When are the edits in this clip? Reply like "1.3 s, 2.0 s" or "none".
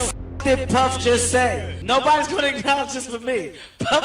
1.7 s